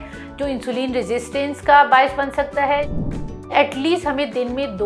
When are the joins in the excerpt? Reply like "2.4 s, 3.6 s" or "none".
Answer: 3.5 s

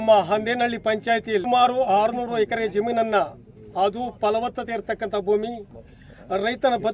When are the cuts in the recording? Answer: 1.4 s

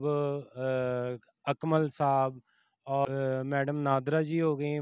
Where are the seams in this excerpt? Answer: 3.1 s

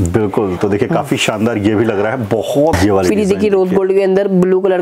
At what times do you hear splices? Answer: 2.8 s

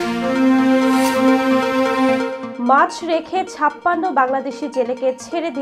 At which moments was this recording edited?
2.4 s

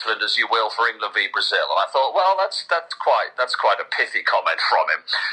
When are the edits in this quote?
none

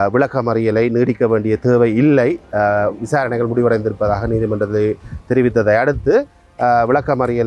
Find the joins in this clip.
none

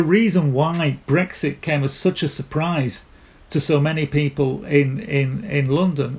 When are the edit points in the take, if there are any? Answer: none

